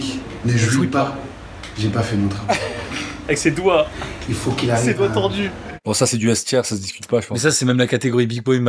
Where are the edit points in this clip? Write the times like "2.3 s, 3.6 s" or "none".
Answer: none